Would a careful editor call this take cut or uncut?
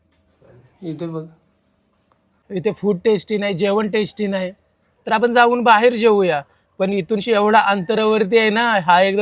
cut